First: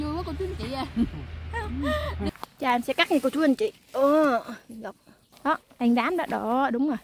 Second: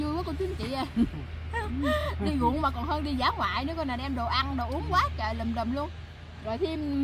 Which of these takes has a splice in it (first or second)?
first